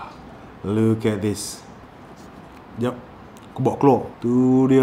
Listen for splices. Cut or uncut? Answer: uncut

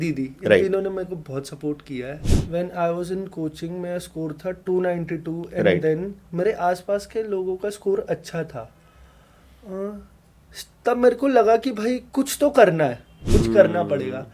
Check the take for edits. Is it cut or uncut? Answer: cut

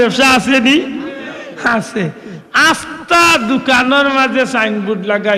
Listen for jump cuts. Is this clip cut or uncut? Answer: uncut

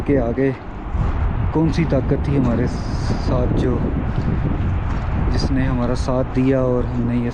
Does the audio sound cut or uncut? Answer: uncut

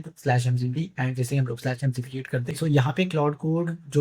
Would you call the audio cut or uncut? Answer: cut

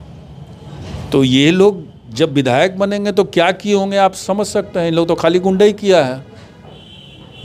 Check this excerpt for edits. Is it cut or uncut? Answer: uncut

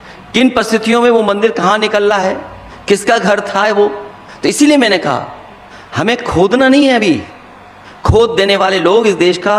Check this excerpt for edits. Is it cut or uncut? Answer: uncut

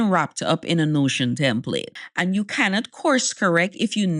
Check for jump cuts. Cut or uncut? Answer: cut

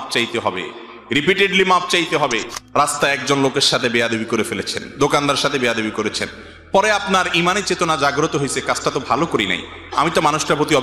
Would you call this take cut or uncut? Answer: cut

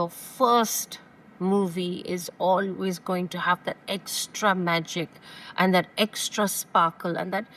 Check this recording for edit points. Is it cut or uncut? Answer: uncut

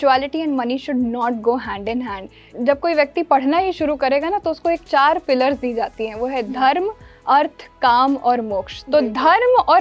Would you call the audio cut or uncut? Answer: cut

